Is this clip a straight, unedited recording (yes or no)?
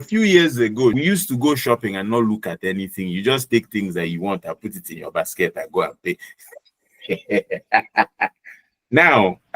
no